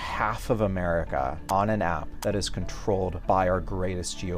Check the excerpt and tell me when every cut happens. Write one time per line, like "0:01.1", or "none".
0:01.4
0:02.1
0:03.2